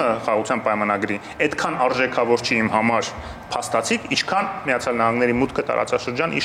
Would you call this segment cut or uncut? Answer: uncut